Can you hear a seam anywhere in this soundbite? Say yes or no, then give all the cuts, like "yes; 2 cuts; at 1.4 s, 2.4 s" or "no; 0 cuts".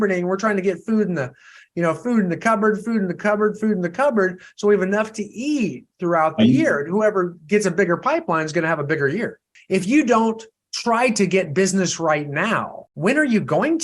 yes; 1 cut; at 12.8 s